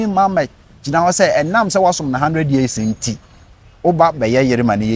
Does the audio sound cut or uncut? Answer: uncut